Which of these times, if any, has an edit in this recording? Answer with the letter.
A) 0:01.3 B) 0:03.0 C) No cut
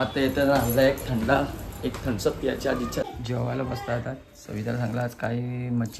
B